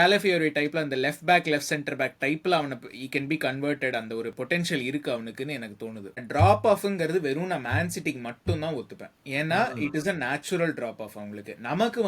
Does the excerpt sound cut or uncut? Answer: cut